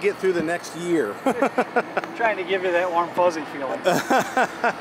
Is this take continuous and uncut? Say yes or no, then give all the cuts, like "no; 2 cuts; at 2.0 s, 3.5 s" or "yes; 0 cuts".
yes; 0 cuts